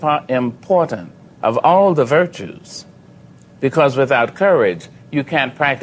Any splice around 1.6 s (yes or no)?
no